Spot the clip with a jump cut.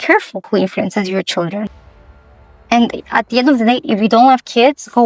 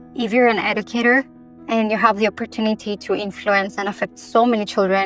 first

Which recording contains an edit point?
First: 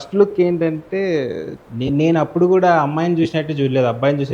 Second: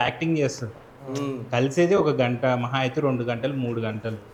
first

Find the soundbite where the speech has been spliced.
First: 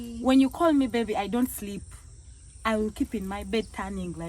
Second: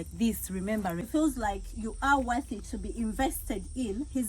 second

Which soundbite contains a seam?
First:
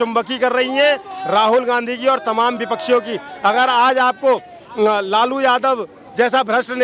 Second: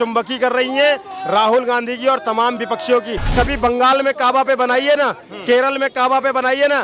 second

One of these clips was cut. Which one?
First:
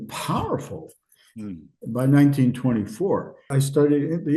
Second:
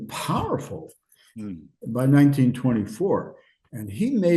first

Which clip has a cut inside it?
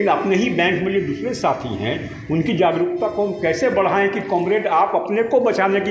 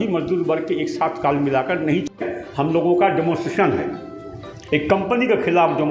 second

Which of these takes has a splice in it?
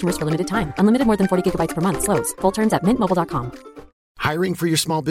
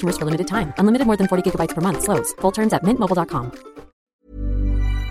second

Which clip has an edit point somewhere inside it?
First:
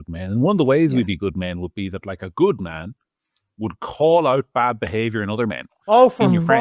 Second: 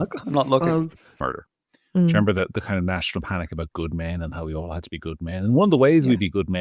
second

